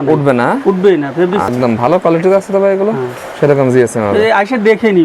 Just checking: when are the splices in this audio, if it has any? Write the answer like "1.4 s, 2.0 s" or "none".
1.5 s